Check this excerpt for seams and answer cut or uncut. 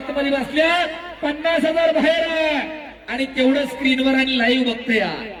uncut